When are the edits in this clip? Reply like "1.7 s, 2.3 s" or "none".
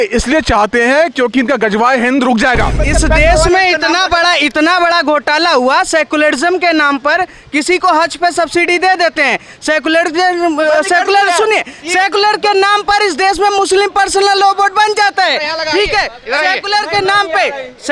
2.8 s